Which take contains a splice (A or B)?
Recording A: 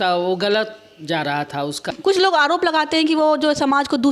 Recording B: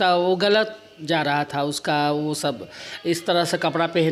A